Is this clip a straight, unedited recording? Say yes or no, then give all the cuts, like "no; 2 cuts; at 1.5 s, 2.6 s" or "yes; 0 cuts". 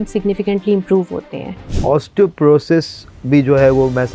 no; 1 cut; at 1.8 s